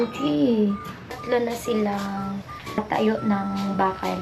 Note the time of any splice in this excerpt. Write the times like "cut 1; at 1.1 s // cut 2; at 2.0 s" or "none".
cut 1; at 1.1 s

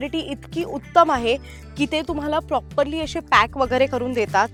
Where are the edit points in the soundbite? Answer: none

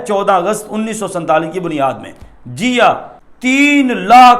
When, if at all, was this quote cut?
cut 1; at 3.3 s

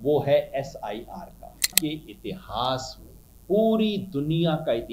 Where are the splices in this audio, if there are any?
cut 1; at 1.8 s

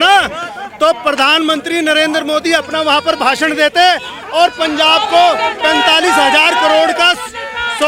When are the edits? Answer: none

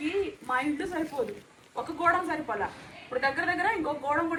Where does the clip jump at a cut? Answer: none

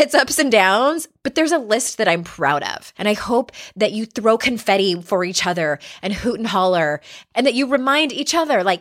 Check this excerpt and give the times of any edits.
cut 1; at 2.8 s // cut 2; at 7.1 s

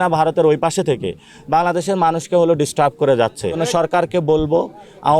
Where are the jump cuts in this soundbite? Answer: cut 1; at 3.6 s

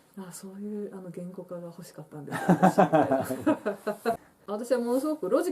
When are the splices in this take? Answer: cut 1; at 4.2 s

